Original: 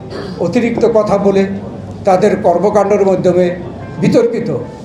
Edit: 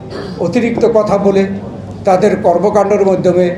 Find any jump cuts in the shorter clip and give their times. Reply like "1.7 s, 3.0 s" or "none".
none